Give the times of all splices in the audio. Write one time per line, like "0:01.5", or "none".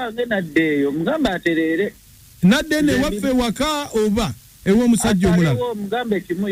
none